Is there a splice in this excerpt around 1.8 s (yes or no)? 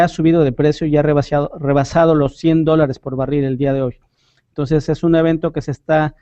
yes